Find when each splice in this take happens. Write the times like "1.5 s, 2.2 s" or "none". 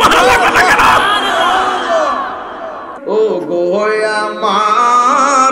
2.9 s